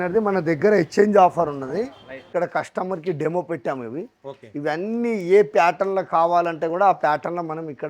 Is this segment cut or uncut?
cut